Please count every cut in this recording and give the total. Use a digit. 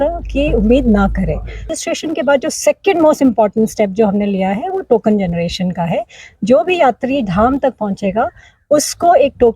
1